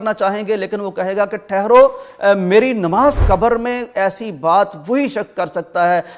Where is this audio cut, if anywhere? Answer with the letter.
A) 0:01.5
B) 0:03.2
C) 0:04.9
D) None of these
B